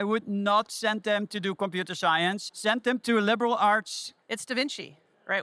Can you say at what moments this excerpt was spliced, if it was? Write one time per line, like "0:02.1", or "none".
0:02.4
0:04.1